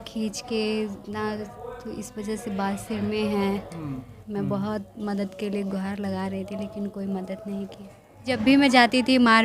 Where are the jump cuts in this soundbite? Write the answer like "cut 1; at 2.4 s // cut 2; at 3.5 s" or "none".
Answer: cut 1; at 4.2 s // cut 2; at 8.3 s

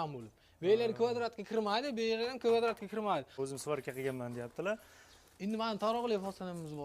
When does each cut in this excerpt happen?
cut 1; at 3.3 s

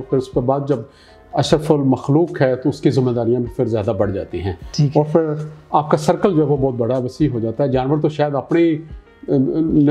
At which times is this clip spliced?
none

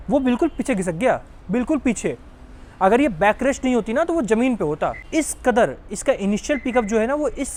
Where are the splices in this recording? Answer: none

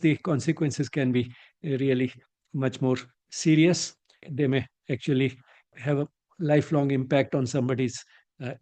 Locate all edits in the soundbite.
cut 1; at 4.2 s // cut 2; at 5.7 s

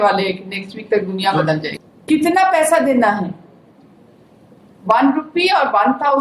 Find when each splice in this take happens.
cut 1; at 1.7 s

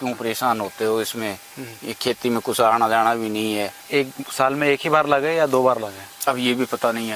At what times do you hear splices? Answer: cut 1; at 3.8 s

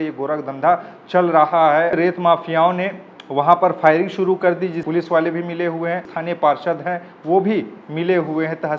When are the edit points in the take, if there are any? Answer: cut 1; at 1.9 s // cut 2; at 4.8 s // cut 3; at 6.1 s

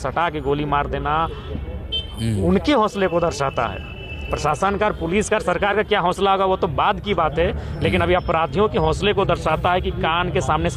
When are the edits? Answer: none

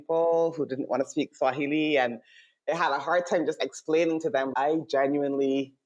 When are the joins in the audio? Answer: cut 1; at 4.5 s

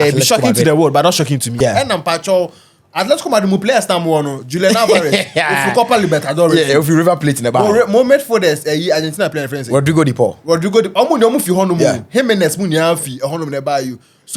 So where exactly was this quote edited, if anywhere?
cut 1; at 1.5 s

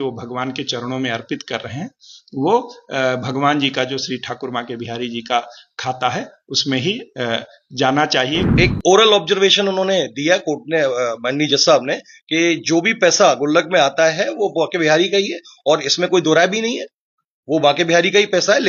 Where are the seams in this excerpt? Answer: cut 1; at 8.5 s

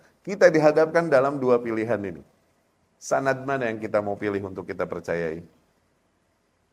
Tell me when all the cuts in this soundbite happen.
none

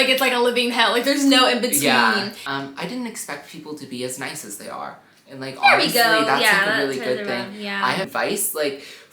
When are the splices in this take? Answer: cut 1; at 2.4 s // cut 2; at 8.1 s

